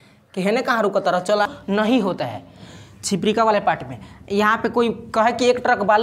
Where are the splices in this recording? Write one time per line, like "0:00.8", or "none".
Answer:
0:01.5